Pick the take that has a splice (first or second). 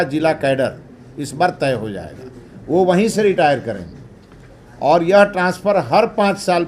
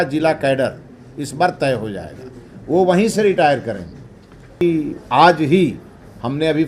second